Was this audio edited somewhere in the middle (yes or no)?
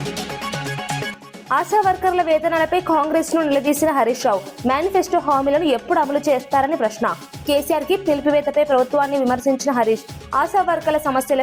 yes